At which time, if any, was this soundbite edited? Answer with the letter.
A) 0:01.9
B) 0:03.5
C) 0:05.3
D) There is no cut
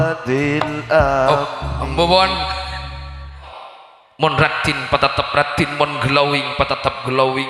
B